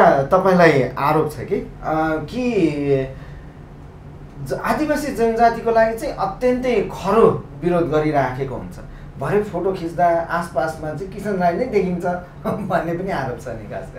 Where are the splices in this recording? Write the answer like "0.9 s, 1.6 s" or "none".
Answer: none